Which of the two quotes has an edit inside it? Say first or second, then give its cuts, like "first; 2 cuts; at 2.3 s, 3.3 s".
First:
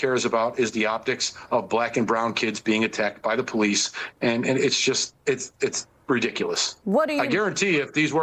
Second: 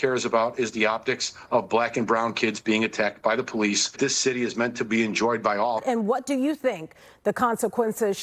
second; 2 cuts; at 3.9 s, 5.8 s